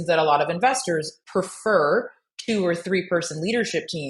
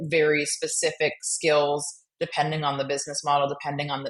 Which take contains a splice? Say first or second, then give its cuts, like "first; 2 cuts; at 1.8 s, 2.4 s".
first; 1 cut; at 1.2 s